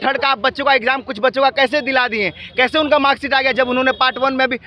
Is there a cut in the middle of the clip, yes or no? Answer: no